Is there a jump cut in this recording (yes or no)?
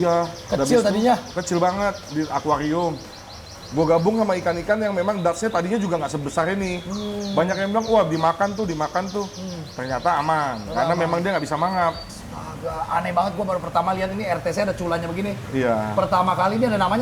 yes